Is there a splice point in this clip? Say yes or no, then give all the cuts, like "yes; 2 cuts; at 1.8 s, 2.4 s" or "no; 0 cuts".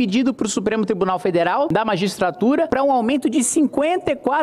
yes; 2 cuts; at 1.7 s, 2.7 s